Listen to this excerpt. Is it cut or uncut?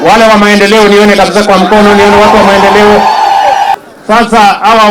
cut